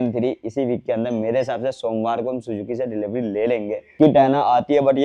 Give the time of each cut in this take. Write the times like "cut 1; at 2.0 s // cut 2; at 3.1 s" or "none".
cut 1; at 3.9 s